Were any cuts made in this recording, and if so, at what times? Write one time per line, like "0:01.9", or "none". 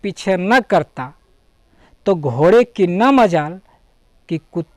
none